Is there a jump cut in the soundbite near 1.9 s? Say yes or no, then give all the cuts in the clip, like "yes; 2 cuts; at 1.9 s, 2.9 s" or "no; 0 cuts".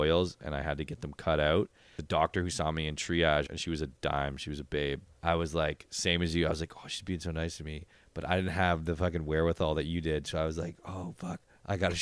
yes; 3 cuts; at 1.9 s, 3.5 s, 5.1 s